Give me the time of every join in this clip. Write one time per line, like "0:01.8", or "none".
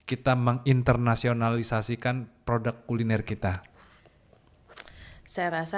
none